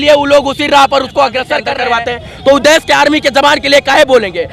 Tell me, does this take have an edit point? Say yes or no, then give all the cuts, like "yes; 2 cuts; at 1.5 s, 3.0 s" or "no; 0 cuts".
yes; 1 cut; at 1.7 s